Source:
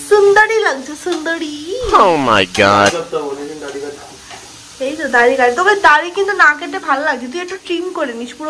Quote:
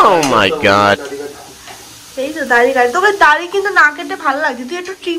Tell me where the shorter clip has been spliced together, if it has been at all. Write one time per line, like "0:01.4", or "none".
0:01.0